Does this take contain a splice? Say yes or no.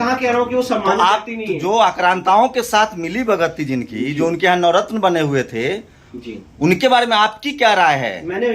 no